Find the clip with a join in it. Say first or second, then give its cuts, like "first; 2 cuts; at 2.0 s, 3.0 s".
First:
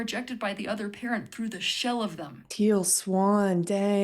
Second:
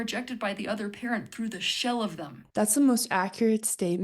second; 1 cut; at 2.3 s